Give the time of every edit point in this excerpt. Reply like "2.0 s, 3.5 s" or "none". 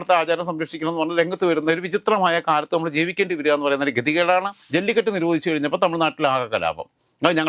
4.6 s

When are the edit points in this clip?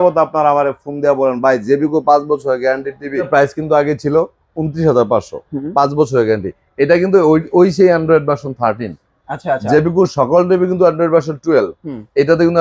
3.3 s

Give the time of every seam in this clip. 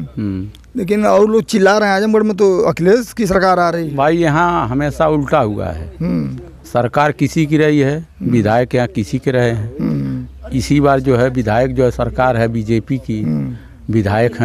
none

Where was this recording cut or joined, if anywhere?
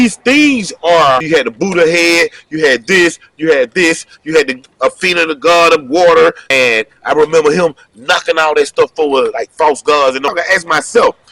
1.2 s, 6.4 s, 10.3 s

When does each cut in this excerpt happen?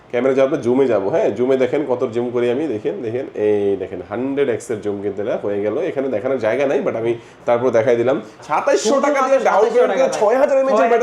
8.3 s

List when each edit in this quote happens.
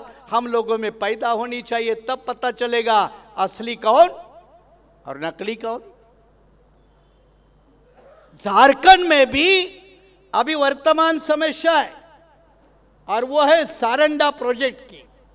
none

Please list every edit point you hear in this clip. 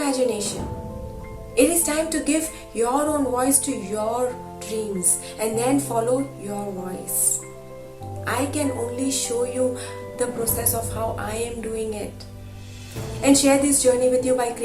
none

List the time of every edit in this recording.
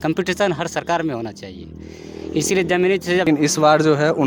3.2 s

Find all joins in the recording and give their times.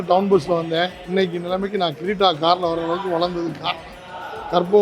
1.0 s

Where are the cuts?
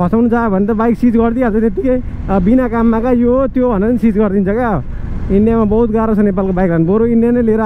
none

